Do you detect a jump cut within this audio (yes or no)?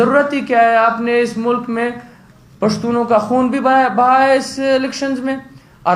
no